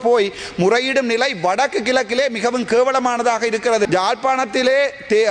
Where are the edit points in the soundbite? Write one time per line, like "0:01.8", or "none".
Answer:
0:03.9